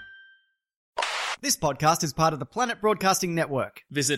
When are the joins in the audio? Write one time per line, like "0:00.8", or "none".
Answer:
0:01.1